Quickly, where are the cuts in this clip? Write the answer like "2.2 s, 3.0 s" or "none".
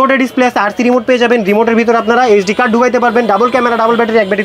none